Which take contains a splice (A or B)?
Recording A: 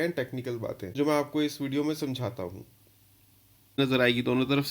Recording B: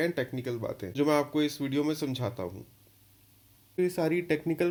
A